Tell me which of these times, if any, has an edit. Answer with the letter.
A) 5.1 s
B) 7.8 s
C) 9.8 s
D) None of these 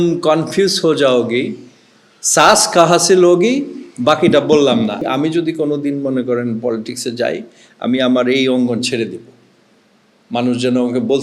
A